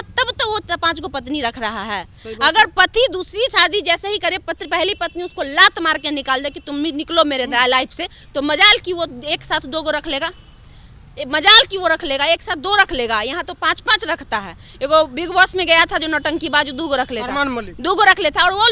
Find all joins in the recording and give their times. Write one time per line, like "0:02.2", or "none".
none